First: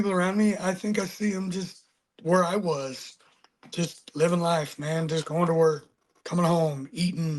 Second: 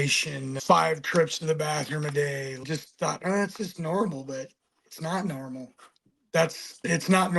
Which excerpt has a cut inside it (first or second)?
second